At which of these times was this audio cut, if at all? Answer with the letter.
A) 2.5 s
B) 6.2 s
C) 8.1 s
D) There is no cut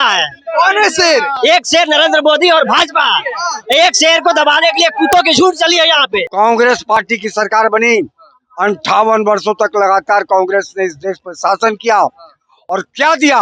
B